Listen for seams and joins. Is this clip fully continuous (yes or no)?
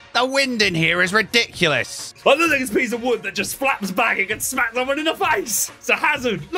no